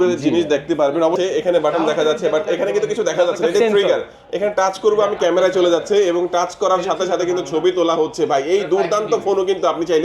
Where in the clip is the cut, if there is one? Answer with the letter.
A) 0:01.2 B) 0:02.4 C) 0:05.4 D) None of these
A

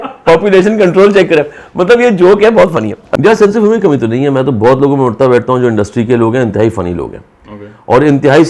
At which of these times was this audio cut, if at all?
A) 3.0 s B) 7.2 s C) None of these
A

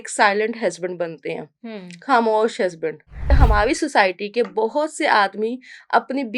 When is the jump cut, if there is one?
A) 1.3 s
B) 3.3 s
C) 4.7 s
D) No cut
B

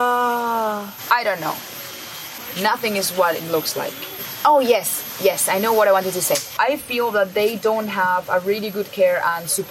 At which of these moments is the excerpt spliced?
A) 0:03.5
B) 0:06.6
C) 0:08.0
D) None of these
B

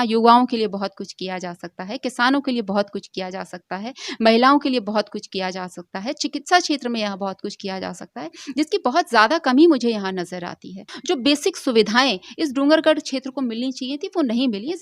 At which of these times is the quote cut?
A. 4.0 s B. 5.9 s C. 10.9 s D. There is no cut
C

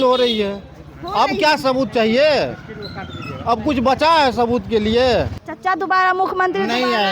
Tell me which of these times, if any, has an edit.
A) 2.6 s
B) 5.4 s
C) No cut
B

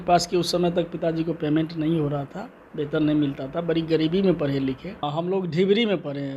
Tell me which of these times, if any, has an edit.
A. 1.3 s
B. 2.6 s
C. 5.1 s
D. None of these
C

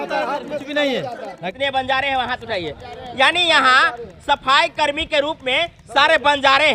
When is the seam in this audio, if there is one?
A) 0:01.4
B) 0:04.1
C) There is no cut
A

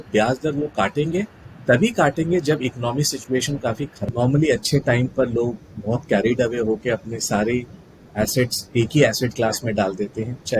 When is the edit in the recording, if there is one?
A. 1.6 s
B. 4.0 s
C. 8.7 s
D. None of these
B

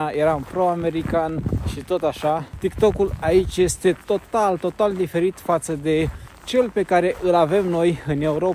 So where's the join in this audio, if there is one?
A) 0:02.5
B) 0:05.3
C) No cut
A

